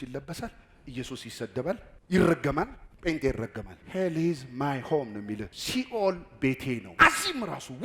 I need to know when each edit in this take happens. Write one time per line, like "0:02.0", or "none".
0:03.7
0:05.5
0:06.9